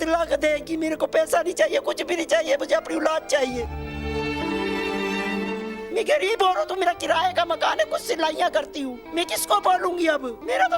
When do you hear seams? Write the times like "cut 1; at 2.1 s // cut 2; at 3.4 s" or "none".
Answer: none